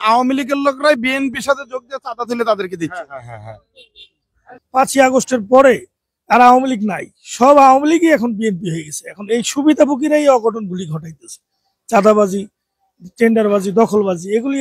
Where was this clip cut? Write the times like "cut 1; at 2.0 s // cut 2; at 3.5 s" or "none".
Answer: cut 1; at 4.5 s